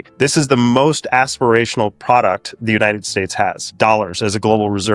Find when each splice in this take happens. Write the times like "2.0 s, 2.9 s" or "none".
3.7 s